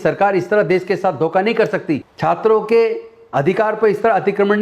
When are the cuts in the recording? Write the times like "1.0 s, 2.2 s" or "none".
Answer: 2.1 s